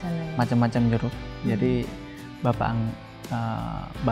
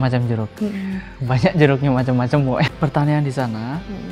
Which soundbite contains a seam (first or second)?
second